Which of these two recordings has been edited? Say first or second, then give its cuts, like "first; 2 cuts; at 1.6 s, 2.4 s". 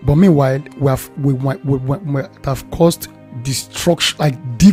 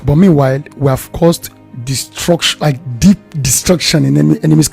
second; 1 cut; at 1.1 s